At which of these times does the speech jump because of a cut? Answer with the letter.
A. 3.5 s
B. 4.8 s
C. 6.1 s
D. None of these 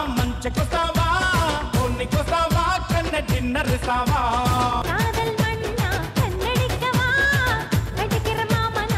B